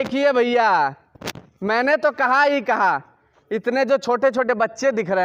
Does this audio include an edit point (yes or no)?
no